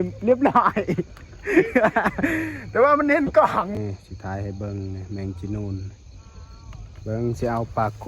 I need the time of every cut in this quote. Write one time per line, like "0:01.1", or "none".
0:03.7